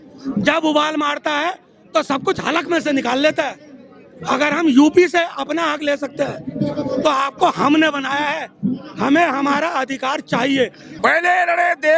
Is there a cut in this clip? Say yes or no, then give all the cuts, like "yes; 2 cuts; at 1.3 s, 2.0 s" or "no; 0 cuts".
yes; 1 cut; at 10.9 s